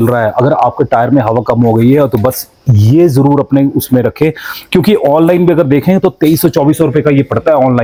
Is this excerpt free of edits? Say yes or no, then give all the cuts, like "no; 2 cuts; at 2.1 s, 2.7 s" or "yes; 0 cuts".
yes; 0 cuts